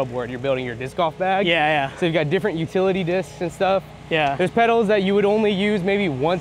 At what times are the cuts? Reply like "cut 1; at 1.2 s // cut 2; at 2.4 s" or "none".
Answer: none